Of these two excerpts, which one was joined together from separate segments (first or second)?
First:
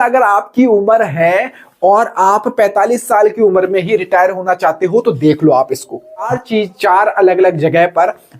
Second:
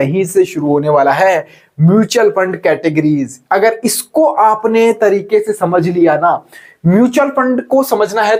first